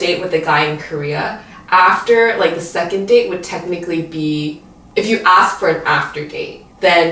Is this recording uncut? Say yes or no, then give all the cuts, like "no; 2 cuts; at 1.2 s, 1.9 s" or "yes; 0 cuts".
yes; 0 cuts